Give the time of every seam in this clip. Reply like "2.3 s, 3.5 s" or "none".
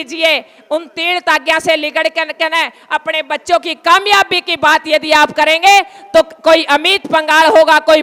none